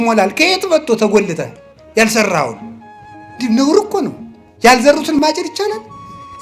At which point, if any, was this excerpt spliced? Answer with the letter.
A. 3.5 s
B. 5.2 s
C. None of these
B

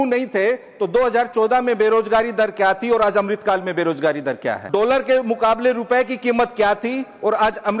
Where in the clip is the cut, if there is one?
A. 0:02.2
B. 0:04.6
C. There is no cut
B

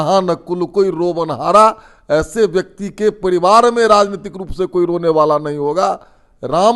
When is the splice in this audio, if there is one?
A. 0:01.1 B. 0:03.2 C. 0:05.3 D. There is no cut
D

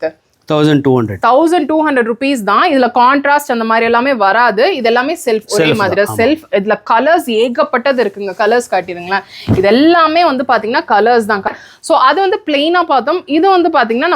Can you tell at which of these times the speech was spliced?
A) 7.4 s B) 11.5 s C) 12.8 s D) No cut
B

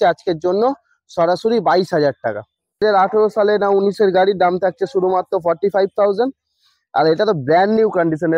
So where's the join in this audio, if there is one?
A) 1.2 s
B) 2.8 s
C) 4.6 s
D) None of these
B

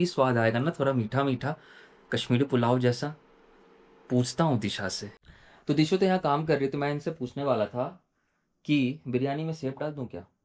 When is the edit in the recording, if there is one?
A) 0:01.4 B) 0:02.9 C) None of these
C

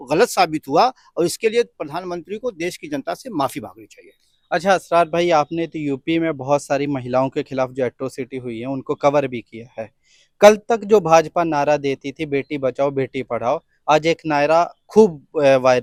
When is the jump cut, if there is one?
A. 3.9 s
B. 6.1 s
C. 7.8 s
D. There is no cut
D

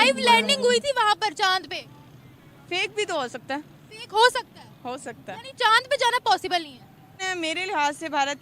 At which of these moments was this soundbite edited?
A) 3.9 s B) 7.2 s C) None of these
B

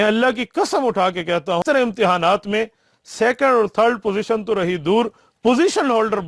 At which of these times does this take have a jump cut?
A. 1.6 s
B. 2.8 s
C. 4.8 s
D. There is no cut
A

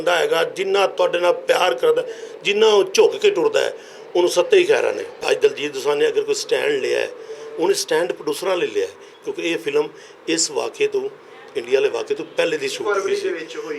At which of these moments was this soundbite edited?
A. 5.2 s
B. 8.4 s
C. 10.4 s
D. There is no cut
A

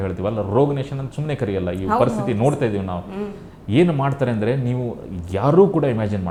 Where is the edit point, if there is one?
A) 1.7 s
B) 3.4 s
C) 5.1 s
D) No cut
D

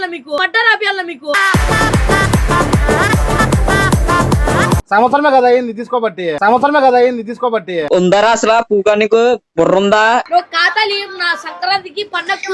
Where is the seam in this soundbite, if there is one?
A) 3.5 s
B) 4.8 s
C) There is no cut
C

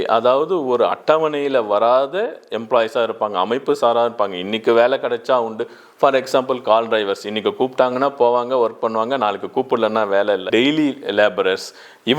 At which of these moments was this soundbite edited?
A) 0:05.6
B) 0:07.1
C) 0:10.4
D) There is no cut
C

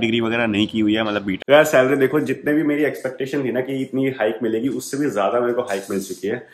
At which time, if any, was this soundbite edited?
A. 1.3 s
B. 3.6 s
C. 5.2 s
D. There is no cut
A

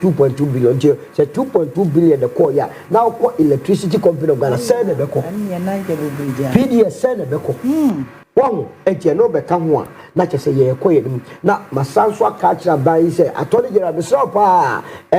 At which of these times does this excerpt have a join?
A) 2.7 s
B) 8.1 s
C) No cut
B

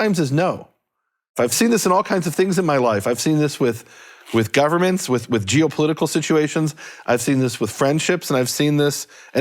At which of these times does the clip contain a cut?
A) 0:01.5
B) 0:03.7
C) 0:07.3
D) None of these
A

